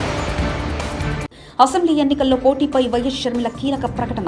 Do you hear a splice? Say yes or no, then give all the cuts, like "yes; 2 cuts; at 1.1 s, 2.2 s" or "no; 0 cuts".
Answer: yes; 1 cut; at 1.1 s